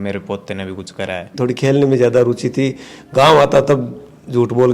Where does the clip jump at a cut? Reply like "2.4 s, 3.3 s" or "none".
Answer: 1.3 s